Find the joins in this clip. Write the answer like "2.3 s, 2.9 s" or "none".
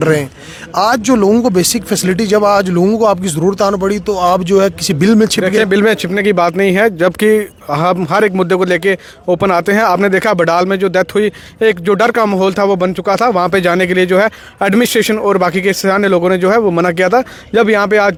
none